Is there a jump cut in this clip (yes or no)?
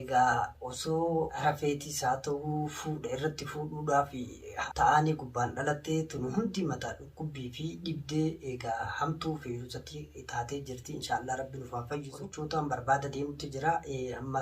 yes